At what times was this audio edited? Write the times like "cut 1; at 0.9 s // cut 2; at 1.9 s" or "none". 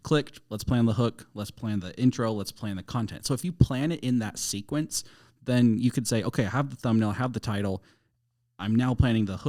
none